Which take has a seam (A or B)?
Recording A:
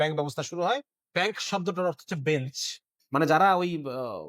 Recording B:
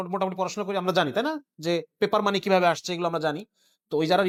A